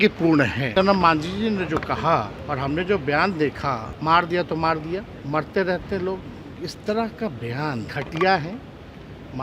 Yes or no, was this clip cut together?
yes